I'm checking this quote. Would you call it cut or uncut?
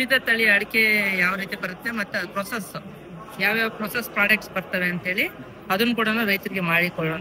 uncut